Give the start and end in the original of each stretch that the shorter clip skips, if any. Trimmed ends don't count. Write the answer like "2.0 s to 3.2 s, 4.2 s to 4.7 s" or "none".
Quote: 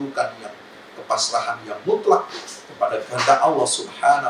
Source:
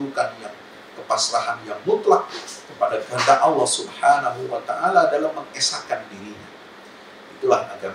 none